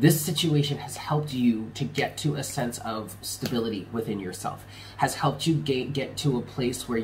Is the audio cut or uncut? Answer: uncut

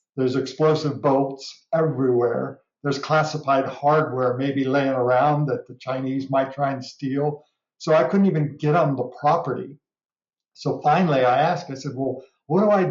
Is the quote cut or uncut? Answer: uncut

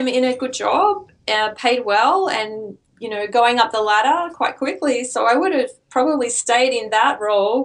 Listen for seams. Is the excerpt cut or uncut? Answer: uncut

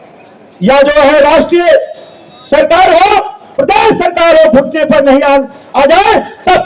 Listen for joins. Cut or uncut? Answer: uncut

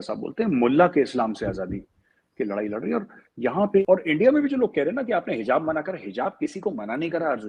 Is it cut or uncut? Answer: cut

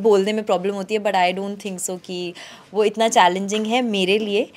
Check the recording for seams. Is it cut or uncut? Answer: uncut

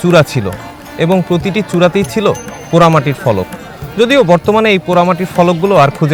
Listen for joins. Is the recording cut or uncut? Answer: uncut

